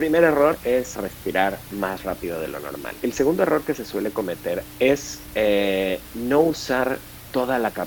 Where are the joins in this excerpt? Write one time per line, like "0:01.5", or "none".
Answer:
0:00.9
0:02.9
0:04.7